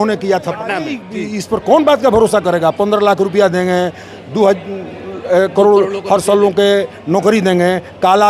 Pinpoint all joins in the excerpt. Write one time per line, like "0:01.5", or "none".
0:01.0